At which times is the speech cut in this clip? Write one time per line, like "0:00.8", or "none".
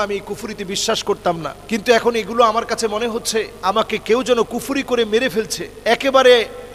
0:01.5
0:03.5
0:05.6